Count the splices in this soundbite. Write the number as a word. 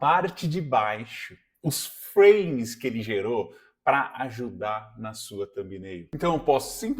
zero